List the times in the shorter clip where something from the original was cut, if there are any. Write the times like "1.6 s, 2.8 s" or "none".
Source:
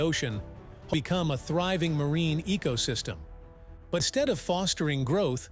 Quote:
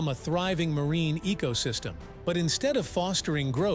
2.5 s